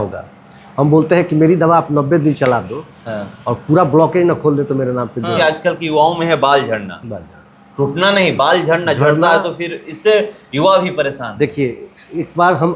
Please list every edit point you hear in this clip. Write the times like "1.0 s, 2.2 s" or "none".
5.4 s